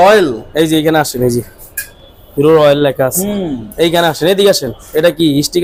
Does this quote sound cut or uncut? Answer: uncut